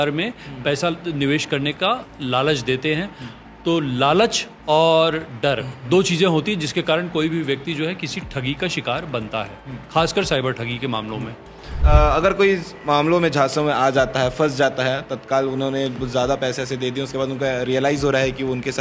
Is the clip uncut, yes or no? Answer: no